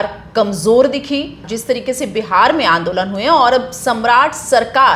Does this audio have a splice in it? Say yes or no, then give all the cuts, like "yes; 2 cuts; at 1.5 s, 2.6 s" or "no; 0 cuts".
yes; 1 cut; at 1.5 s